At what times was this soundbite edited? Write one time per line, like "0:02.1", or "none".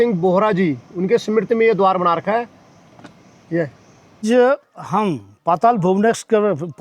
0:04.2

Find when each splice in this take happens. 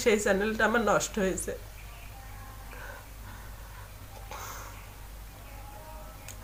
none

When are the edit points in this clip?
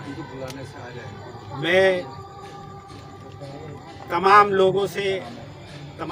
none

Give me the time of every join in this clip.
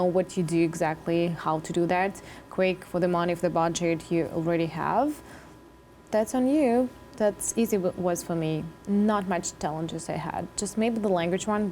none

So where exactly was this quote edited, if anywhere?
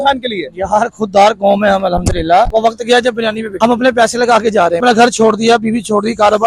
0:02.5
0:03.5
0:04.8

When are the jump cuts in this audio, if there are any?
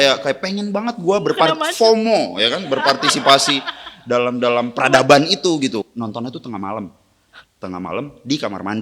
0:05.9

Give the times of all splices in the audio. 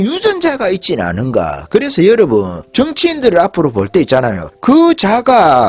0:02.6
0:04.4

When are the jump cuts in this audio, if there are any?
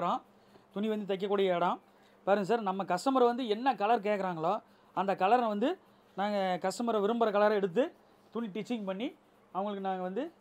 none

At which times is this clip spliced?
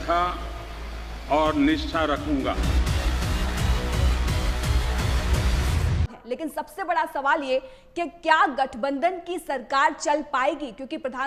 0:06.2

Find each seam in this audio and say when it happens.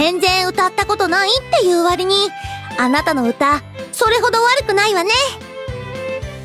0:05.4

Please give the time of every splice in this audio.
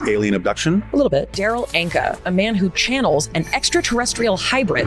0:01.3

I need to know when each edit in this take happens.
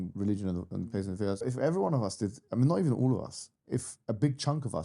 0:01.4

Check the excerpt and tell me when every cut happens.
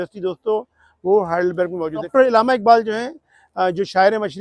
0:02.1

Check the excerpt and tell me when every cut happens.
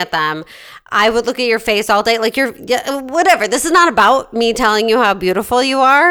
none

